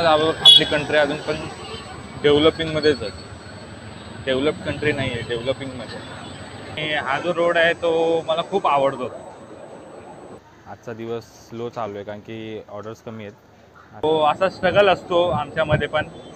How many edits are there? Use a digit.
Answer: 3